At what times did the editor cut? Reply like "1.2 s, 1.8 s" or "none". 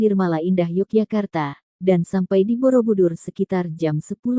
none